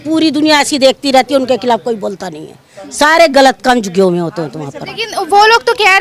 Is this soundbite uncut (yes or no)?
yes